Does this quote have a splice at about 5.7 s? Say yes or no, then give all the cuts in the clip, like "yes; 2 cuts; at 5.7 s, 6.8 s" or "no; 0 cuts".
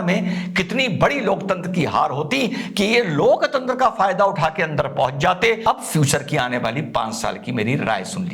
yes; 1 cut; at 5.7 s